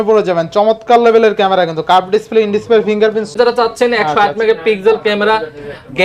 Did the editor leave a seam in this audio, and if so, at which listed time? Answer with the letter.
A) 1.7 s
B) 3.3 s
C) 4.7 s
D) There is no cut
B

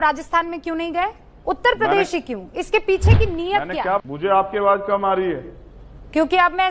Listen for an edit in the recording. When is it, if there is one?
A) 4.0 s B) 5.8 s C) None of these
A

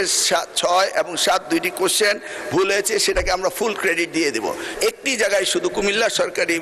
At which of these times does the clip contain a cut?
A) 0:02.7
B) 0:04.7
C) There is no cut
B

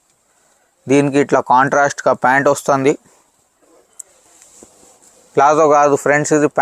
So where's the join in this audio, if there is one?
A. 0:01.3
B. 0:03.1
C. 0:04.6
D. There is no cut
D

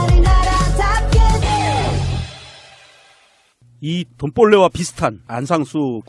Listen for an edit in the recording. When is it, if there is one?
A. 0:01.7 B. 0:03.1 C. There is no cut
B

